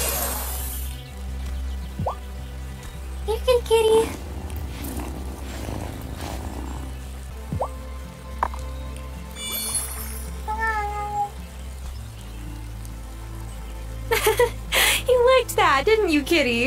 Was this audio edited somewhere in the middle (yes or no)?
no